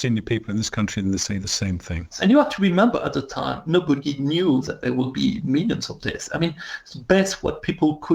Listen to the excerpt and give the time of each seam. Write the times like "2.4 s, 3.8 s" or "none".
2.1 s, 4.7 s